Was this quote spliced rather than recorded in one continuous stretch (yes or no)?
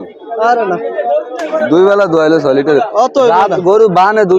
no